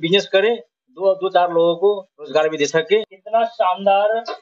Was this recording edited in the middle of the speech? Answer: yes; 1 cut; at 3.2 s

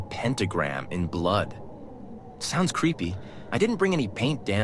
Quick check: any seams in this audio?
no; 0 cuts

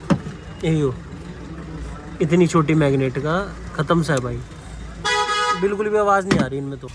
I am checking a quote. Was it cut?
no; 0 cuts

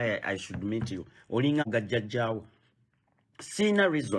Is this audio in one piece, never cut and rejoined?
no; 1 cut; at 1.6 s

